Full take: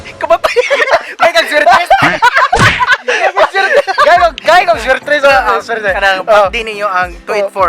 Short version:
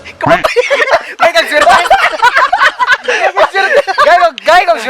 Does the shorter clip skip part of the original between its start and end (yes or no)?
no